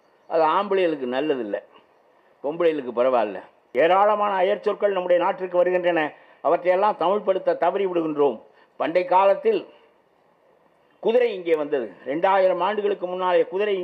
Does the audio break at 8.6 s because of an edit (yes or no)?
no